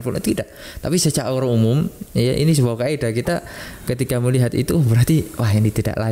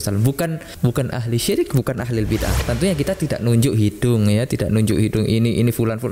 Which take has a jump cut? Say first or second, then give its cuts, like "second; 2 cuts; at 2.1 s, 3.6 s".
second; 1 cut; at 2.6 s